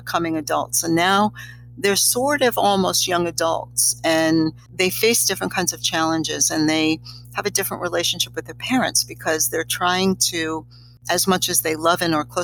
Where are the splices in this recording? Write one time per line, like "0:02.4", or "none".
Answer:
0:04.6

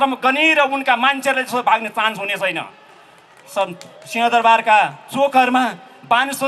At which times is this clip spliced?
none

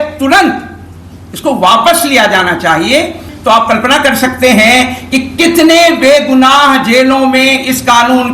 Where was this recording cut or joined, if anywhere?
0:03.3

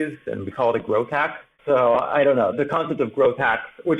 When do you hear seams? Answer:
0:01.5
0:02.5

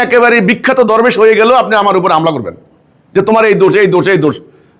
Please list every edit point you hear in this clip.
none

